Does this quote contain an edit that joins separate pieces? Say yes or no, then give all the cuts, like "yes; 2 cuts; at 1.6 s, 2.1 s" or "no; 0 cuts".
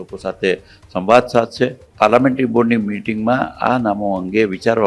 yes; 1 cut; at 1.8 s